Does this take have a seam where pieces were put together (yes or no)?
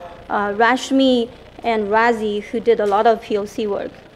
no